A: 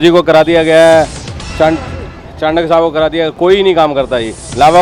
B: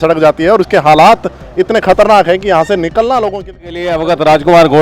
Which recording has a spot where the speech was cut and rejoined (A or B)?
B